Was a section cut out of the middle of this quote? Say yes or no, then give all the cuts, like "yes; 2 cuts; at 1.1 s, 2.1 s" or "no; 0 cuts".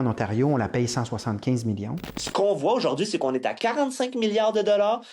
yes; 1 cut; at 2.0 s